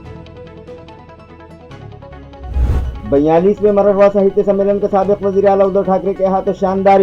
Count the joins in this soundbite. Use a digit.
1